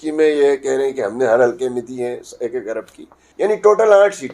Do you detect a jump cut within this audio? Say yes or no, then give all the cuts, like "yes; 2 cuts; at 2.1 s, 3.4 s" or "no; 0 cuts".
yes; 1 cut; at 3.2 s